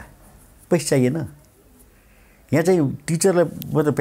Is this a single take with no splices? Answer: yes; 0 cuts

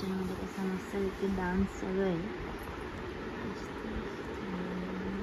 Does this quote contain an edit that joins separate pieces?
no; 0 cuts

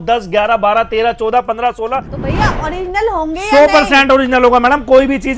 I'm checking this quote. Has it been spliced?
yes; 1 cut; at 2.1 s

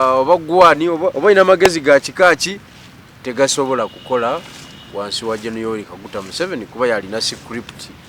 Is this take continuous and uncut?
no; 1 cut; at 1.1 s

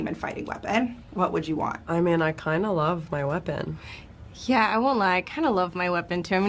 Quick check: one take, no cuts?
yes; 0 cuts

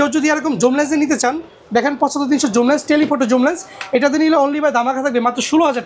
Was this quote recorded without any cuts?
yes; 0 cuts

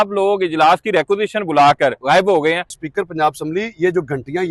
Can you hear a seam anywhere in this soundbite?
yes; 2 cuts; at 2.0 s, 2.8 s

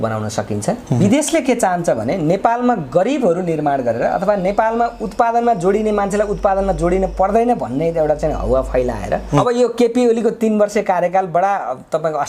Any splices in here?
yes; 2 cuts; at 1.0 s, 9.4 s

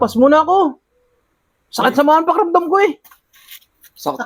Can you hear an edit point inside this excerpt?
no; 0 cuts

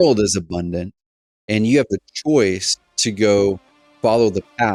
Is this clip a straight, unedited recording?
yes; 0 cuts

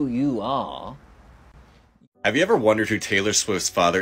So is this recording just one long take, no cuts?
no; 1 cut; at 2.0 s

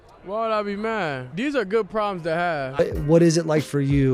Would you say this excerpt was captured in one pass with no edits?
no; 2 cuts; at 1.3 s, 2.8 s

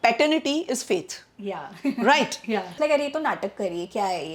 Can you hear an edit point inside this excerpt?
yes; 1 cut; at 2.8 s

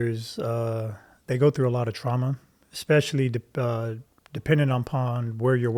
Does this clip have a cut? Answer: no; 0 cuts

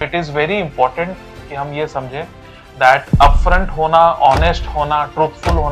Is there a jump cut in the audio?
no; 0 cuts

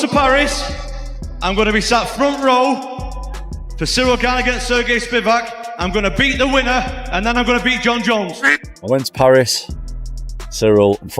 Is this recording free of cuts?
no; 1 cut; at 8.7 s

